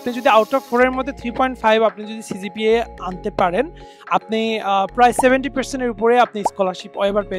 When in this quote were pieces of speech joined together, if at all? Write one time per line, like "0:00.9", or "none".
none